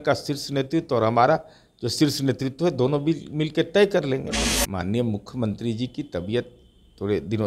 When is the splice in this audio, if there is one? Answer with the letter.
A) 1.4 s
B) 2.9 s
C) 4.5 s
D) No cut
C